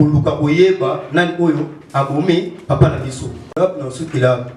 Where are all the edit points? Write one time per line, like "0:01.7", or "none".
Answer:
0:03.5